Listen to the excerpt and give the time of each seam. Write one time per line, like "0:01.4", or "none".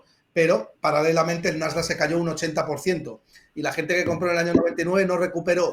none